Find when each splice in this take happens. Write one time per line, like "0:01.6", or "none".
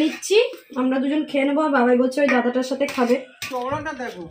0:03.4